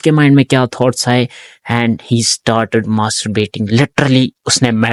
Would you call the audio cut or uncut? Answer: uncut